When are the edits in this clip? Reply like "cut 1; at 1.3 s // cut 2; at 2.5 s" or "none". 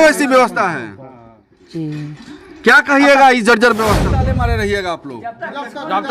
cut 1; at 4.2 s